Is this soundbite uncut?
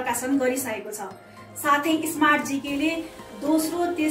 yes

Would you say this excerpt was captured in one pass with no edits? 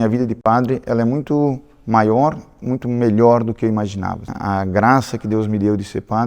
no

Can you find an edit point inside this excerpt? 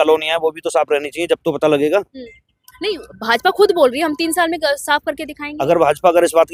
no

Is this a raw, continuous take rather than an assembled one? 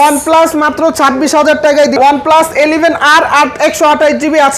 no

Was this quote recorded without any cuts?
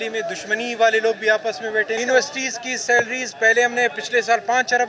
no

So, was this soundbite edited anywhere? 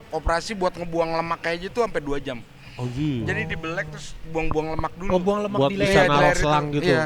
no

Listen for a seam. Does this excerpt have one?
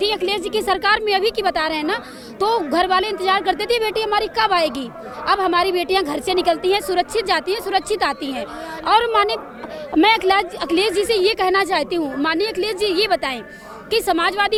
no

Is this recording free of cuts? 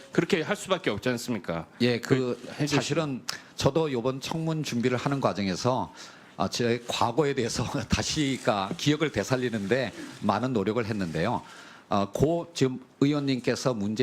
no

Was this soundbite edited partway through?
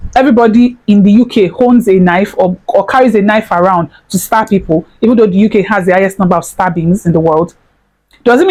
no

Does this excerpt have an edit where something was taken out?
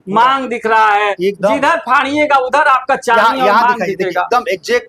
no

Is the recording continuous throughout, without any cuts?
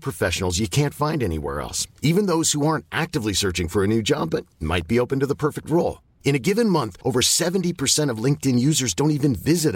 yes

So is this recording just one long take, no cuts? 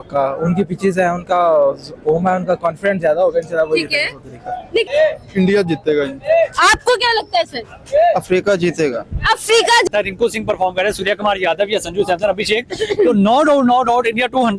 no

